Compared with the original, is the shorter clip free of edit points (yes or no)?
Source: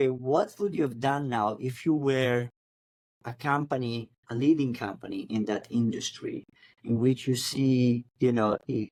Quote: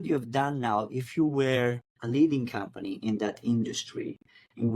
no